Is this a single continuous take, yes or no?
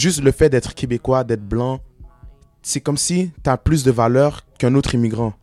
no